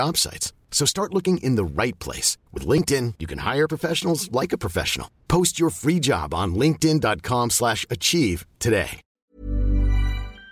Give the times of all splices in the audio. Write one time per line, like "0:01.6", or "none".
0:09.0